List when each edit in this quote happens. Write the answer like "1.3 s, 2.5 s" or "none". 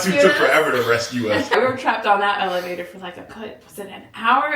1.5 s